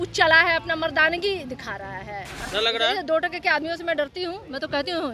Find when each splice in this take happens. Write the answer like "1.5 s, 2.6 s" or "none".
2.3 s

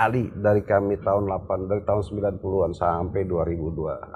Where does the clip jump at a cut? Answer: none

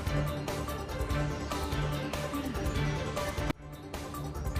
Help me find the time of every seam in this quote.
none

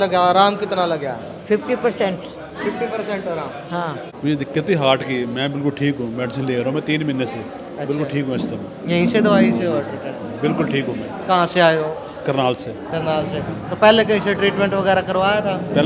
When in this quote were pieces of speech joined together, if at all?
4.1 s

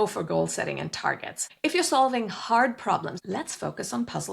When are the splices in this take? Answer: 1.4 s, 3.1 s

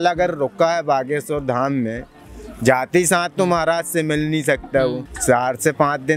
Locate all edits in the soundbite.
none

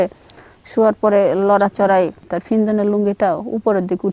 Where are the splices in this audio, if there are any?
2.3 s

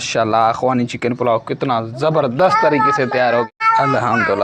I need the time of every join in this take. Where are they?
3.5 s

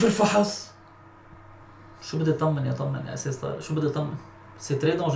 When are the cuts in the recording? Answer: none

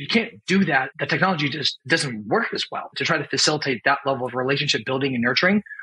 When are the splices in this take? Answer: 0.9 s, 1.7 s, 3.0 s

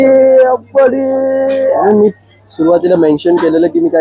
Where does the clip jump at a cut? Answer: 1.9 s

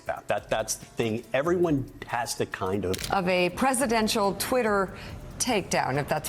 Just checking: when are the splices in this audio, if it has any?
3.0 s

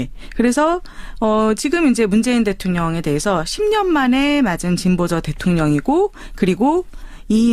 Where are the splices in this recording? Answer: 5.3 s

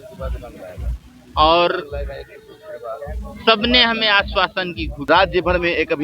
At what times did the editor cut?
5.1 s

